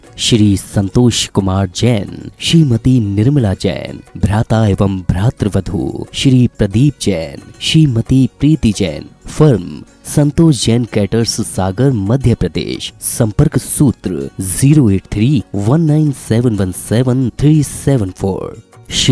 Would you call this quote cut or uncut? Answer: uncut